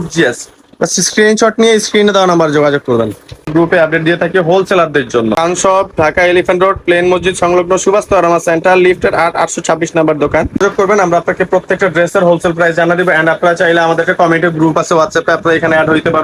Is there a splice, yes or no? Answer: yes